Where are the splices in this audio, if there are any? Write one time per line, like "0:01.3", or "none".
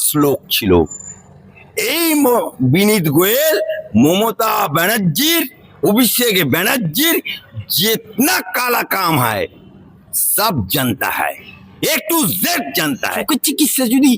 0:13.2